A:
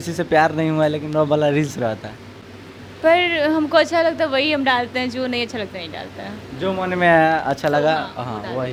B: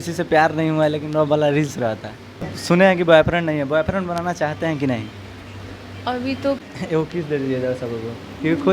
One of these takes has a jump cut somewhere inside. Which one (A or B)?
B